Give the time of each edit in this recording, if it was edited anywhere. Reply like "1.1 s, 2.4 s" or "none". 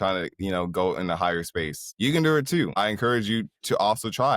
1.8 s, 2.7 s